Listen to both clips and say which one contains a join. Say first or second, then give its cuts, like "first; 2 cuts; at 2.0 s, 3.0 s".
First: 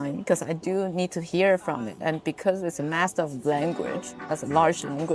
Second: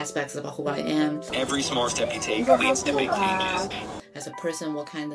second; 2 cuts; at 1.3 s, 4.0 s